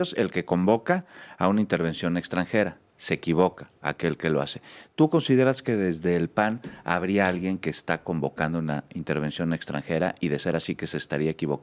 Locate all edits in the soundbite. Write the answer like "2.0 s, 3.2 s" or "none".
none

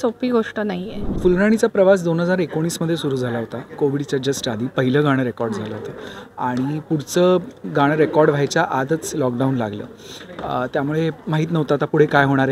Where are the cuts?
1.1 s

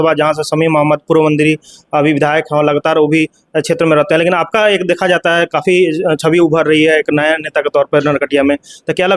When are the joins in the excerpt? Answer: none

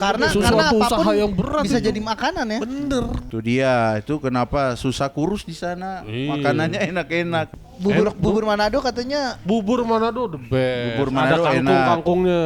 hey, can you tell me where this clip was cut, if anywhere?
3.2 s, 7.6 s

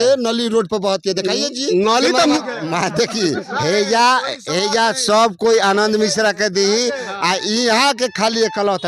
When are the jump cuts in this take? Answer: 2.4 s

